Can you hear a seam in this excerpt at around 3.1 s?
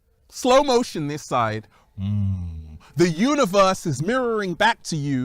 yes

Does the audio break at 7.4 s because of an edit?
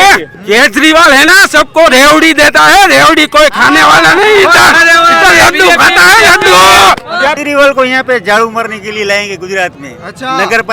yes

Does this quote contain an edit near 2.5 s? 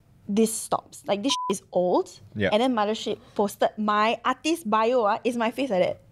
yes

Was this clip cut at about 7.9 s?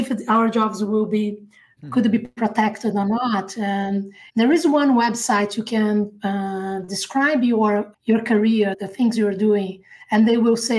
yes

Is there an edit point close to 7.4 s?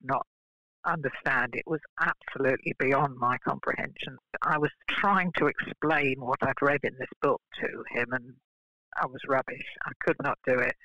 no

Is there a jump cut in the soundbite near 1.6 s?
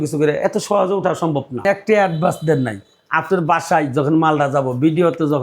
yes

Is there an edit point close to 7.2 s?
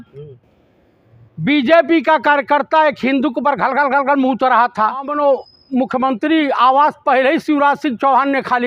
no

